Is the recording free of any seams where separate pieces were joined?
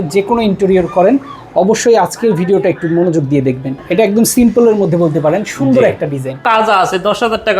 no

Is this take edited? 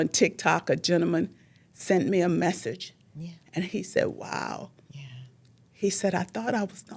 no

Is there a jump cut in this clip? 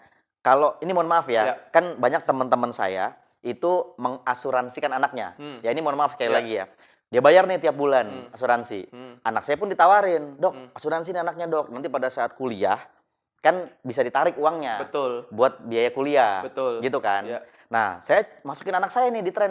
no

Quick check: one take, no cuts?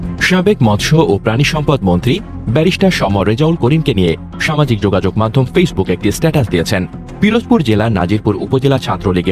yes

